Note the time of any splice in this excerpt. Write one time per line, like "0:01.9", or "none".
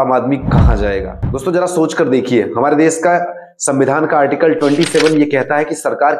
0:01.2